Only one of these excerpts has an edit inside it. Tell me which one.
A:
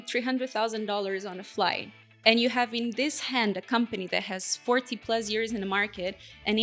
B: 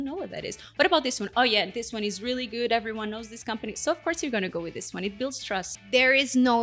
B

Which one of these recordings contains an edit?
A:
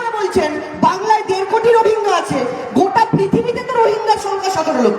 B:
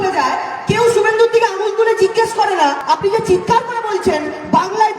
B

